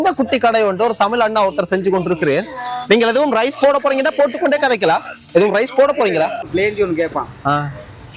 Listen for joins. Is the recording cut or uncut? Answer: cut